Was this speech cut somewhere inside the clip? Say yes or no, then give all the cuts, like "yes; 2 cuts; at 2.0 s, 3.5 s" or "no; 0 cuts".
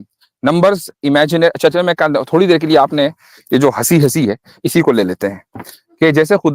no; 0 cuts